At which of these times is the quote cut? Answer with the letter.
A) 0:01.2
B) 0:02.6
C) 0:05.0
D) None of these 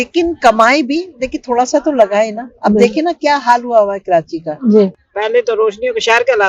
C